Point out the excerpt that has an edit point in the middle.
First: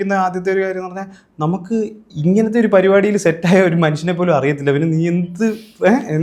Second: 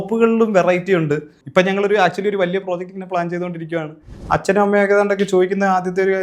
second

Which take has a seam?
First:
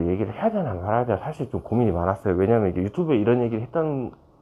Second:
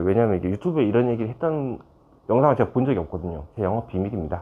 second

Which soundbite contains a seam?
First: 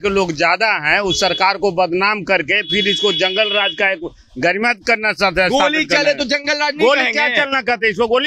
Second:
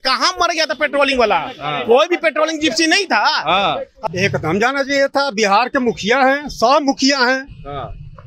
second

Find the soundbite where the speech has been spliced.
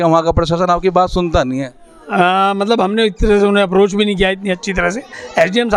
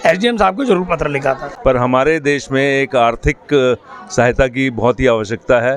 second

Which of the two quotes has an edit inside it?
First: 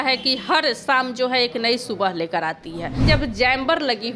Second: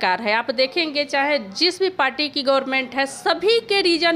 first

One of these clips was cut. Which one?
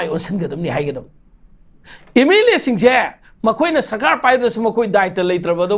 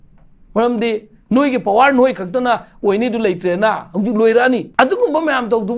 second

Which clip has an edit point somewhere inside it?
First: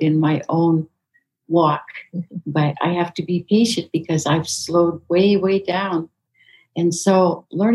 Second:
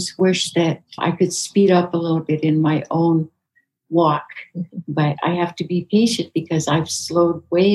second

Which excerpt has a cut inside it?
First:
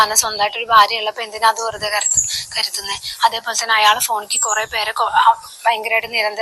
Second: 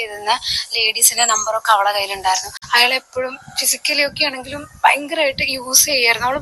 second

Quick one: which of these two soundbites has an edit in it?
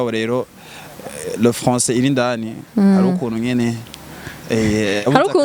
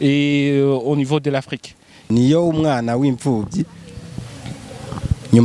second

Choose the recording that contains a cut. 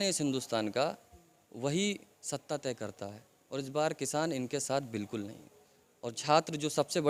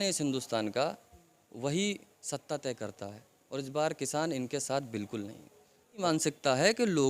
second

